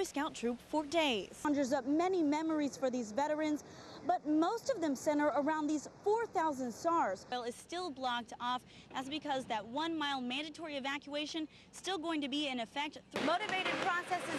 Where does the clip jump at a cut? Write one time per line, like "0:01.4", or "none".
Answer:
0:01.4
0:07.3
0:13.1